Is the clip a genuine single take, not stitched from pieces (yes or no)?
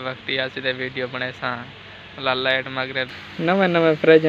no